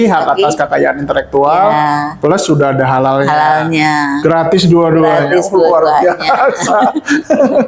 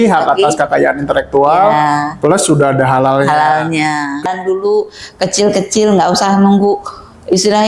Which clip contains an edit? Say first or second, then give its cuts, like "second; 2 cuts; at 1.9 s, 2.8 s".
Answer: second; 1 cut; at 4.2 s